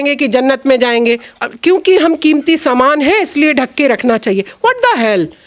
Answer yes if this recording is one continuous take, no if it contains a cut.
no